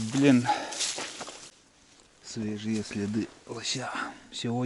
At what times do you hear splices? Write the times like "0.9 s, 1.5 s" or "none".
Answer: 1.5 s